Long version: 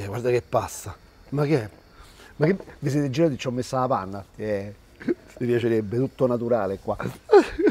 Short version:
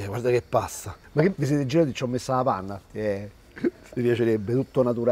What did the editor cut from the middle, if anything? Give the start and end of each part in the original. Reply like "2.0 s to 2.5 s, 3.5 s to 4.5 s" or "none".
1.2 s to 2.7 s